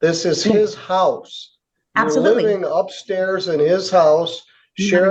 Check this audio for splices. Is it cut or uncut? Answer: uncut